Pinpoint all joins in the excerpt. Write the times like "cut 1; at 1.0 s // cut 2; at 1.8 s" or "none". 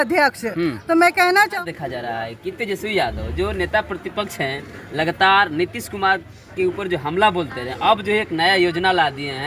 cut 1; at 1.6 s